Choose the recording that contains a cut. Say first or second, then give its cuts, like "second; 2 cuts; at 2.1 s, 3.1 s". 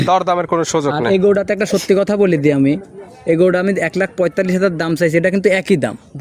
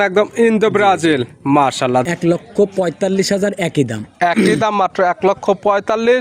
second; 1 cut; at 2.1 s